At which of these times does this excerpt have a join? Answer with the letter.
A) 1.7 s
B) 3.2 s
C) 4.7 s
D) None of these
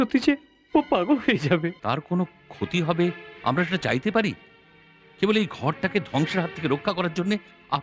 A